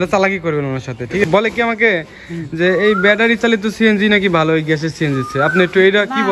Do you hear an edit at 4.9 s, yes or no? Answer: no